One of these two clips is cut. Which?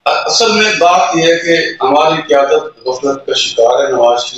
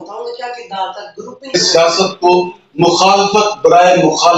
second; 1 cut; at 1.5 s

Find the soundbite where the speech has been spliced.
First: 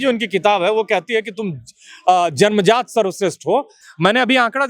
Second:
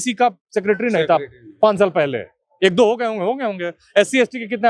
first; 1 cut; at 3.8 s

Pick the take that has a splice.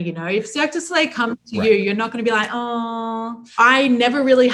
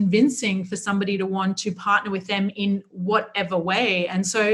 first; 1 cut; at 3.4 s

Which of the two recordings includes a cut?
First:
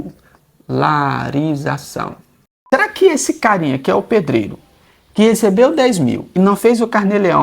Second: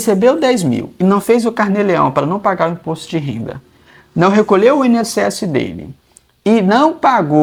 first; 1 cut; at 2.6 s

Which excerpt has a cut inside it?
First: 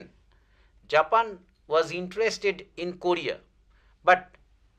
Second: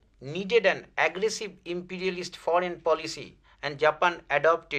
second; 1 cut; at 2.8 s

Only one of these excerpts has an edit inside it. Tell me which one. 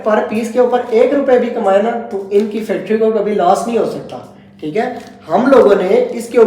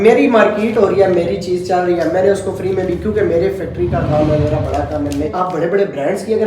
second; 1 cut; at 5.3 s

